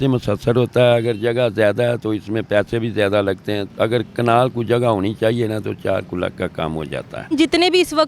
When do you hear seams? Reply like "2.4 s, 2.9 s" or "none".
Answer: 3.7 s, 7.4 s